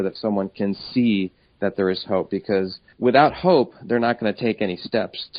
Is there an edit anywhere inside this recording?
no; 0 cuts

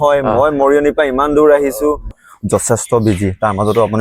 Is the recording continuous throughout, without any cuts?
no; 1 cut; at 2.2 s

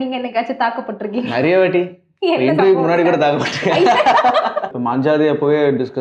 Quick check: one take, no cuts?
no; 1 cut; at 4.8 s

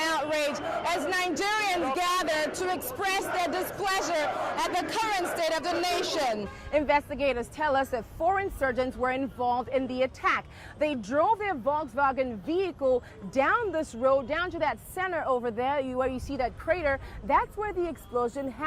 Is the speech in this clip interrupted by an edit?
yes; 1 cut; at 6.5 s

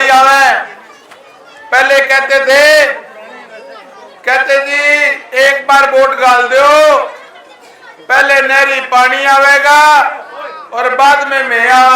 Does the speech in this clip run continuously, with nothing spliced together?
yes; 0 cuts

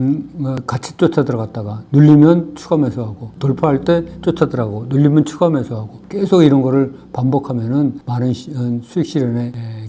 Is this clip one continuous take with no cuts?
yes; 0 cuts

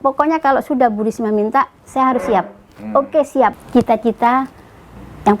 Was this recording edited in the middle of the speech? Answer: yes; 1 cut; at 3.6 s

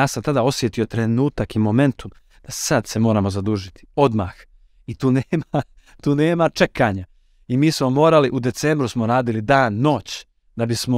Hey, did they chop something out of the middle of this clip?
no; 0 cuts

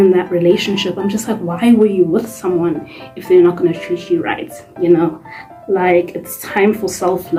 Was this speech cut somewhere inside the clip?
no; 0 cuts

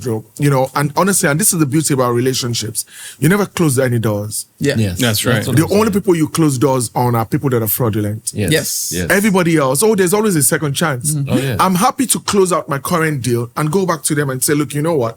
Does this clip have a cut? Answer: no; 0 cuts

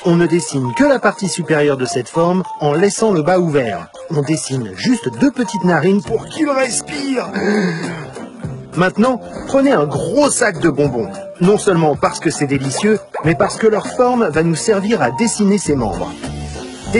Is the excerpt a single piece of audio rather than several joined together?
yes; 0 cuts

